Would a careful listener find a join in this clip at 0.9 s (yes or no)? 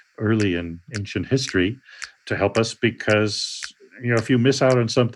yes